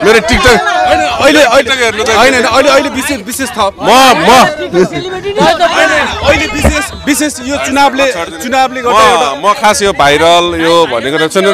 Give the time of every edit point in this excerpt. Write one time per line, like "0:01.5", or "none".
none